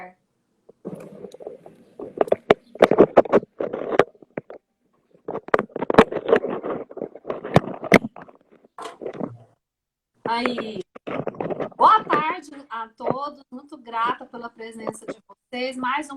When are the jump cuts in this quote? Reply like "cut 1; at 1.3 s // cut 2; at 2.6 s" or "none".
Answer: cut 1; at 6.2 s